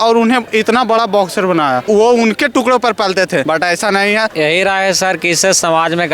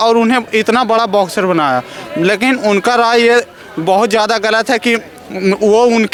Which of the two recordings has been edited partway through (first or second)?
first